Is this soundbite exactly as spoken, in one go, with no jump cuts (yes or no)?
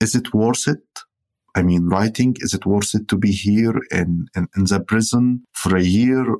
yes